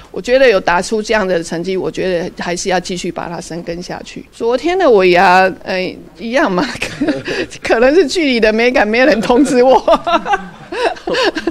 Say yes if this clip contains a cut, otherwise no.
yes